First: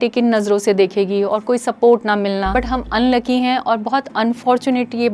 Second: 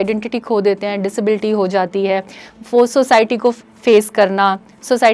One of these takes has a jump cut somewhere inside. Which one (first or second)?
first